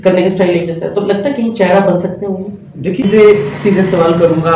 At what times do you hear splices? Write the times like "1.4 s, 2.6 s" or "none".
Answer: 3.0 s